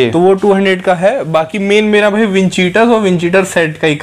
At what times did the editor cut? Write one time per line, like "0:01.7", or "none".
none